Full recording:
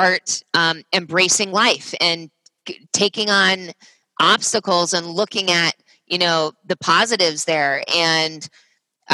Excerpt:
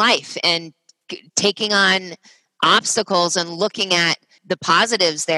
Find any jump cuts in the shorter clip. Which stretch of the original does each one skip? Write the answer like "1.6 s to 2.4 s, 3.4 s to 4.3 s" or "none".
6.0 s to 6.6 s

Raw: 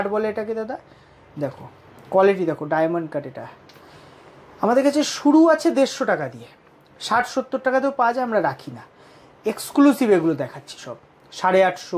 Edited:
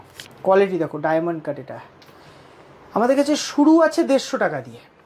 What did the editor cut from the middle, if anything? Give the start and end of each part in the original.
none

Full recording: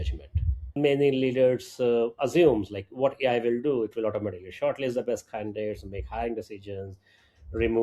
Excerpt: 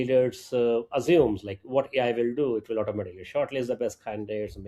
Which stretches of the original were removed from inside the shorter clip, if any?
none

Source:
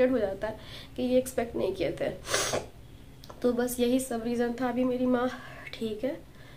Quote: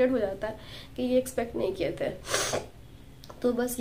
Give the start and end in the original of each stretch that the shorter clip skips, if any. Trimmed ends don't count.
none

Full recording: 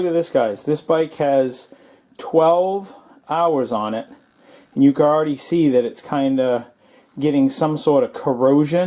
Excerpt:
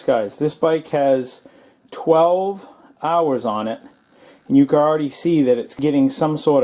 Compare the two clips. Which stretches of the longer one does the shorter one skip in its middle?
6.0 s to 7.1 s

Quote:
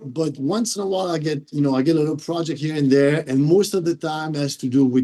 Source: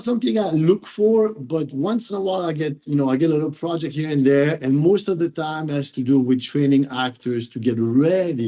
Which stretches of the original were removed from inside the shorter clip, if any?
none

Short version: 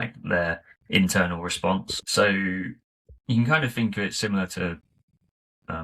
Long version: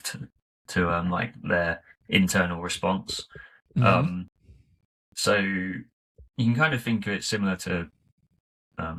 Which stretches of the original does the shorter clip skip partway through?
3.2 s to 5.1 s

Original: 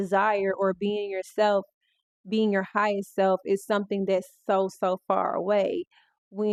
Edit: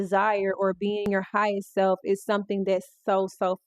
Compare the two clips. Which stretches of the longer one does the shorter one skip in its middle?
1.1 s to 2.5 s

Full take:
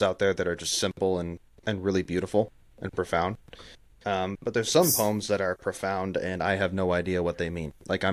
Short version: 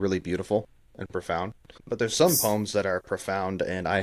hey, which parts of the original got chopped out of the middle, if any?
3.6 s to 4.4 s

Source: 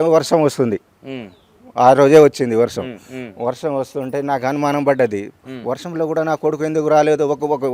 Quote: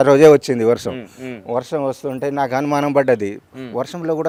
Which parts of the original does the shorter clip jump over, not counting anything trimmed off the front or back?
none

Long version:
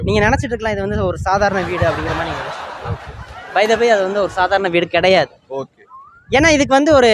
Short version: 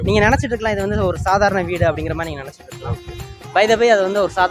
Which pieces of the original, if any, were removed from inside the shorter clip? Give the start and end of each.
none

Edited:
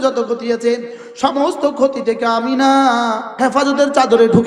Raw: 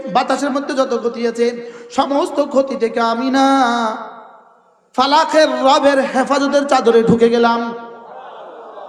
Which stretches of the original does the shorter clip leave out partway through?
4.1 s to 6.1 s

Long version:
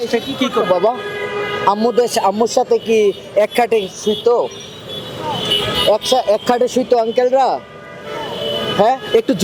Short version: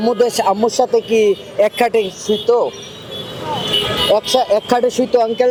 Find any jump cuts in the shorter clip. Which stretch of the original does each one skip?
none

